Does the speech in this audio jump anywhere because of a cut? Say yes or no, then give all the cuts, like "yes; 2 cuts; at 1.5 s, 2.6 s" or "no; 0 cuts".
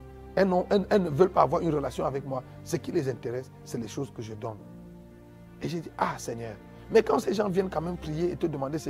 no; 0 cuts